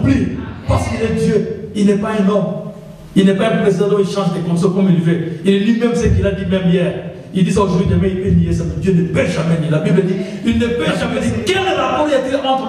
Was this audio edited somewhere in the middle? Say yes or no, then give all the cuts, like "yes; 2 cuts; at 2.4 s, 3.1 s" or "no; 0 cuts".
yes; 1 cut; at 11.0 s